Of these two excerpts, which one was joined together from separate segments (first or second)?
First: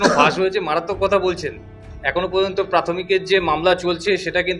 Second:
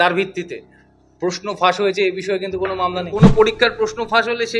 second